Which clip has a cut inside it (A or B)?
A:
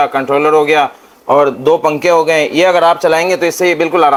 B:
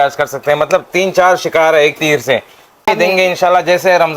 B